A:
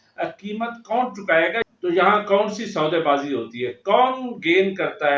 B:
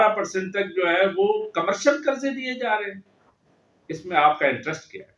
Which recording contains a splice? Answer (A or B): A